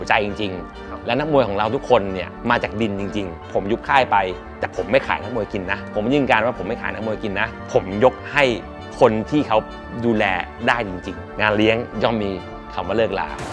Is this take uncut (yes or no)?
no